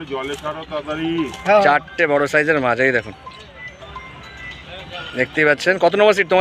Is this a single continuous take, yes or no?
yes